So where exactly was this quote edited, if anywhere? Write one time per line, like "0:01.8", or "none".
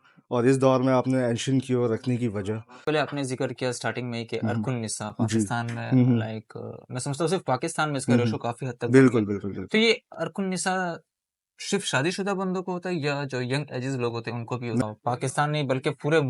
0:02.7
0:14.8

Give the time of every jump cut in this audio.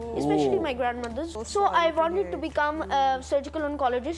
0:01.3

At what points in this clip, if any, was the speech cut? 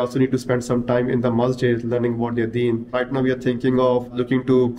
0:02.9

